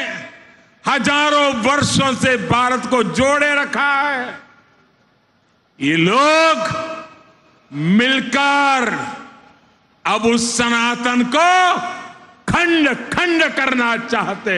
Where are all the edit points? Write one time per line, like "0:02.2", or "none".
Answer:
none